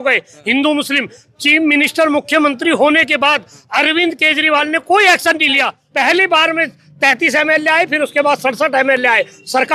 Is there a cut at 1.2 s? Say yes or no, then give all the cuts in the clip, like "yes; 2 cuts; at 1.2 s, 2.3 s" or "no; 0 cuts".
no; 1 cut; at 5.8 s